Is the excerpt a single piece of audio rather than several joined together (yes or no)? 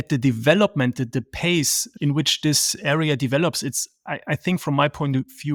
yes